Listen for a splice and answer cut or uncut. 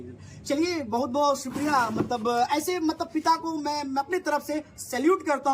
uncut